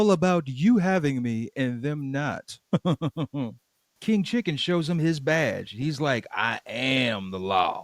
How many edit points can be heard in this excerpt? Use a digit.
1